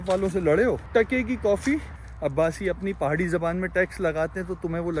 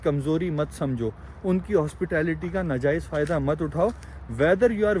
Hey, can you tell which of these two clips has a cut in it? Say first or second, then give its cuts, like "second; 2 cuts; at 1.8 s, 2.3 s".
first; 1 cut; at 2.0 s